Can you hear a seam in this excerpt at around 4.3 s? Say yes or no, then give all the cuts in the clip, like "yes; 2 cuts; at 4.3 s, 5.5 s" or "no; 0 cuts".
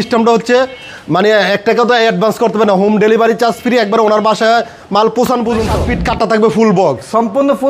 no; 1 cut; at 5.8 s